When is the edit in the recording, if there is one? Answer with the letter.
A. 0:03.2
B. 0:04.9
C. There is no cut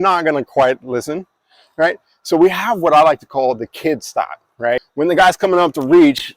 B